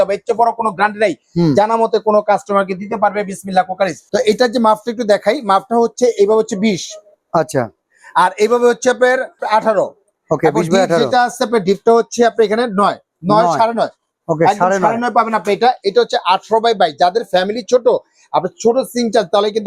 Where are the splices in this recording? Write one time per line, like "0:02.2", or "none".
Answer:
none